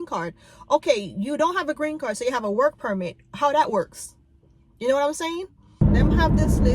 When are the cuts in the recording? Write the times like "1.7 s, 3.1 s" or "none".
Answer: 5.7 s